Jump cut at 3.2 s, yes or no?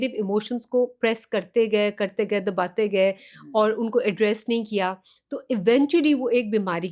no